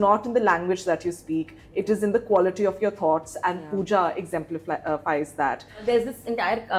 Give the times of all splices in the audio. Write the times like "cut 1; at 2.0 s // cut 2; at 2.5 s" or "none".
cut 1; at 5.8 s